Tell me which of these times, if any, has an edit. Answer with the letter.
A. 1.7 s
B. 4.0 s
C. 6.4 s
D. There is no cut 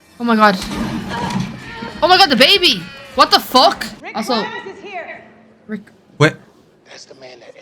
B